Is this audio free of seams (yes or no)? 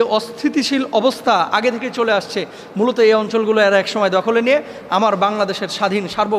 yes